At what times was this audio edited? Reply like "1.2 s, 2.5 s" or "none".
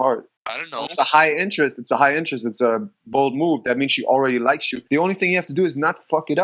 4.7 s